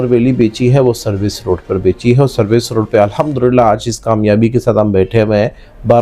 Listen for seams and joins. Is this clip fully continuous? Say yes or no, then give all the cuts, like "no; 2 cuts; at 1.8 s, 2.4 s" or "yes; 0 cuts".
yes; 0 cuts